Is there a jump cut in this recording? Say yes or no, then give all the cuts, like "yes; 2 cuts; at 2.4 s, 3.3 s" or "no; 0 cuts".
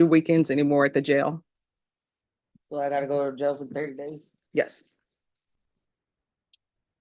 no; 0 cuts